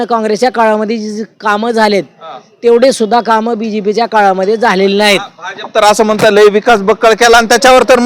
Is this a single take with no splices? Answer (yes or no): yes